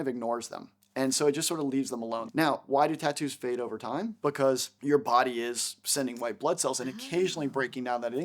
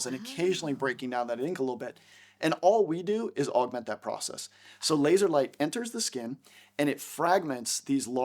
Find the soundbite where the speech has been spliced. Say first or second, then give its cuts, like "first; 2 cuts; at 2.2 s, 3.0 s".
first; 2 cuts; at 2.2 s, 4.7 s